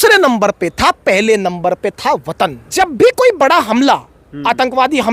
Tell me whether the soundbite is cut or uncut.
cut